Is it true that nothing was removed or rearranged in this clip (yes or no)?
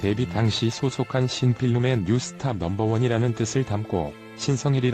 yes